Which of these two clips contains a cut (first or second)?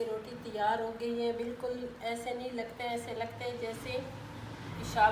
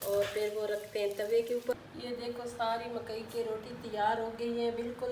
second